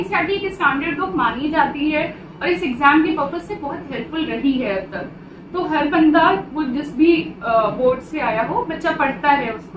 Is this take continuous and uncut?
yes; 0 cuts

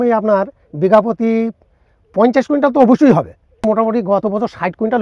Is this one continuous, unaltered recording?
no; 1 cut; at 3.6 s

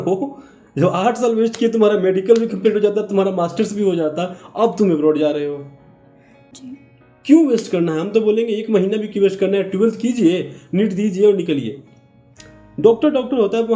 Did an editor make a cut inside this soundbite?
yes; 1 cut; at 6.7 s

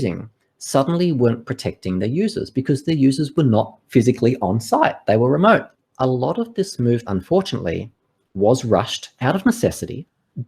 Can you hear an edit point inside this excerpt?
yes; 2 cuts; at 5.8 s, 7.1 s

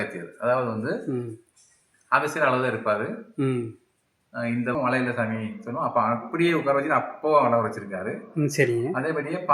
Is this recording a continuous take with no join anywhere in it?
no; 1 cut; at 4.7 s

